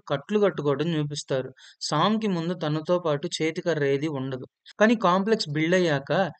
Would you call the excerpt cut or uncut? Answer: uncut